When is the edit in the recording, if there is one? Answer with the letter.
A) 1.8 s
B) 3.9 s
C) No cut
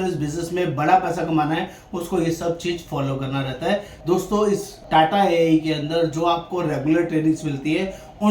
B